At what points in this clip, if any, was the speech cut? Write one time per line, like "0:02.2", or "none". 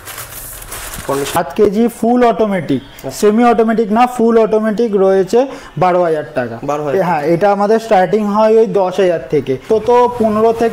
0:01.4
0:09.6